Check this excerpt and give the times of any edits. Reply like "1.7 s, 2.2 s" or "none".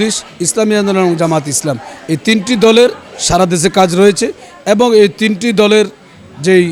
none